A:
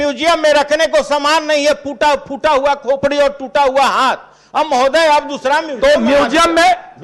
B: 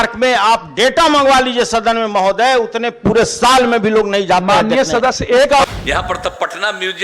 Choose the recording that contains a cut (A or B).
B